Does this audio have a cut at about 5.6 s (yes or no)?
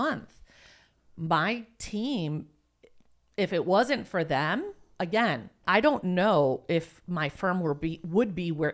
yes